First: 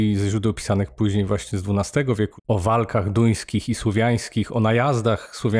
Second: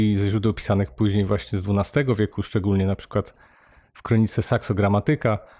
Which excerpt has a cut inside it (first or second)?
first